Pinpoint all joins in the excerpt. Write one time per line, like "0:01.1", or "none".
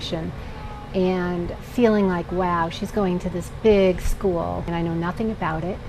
0:04.7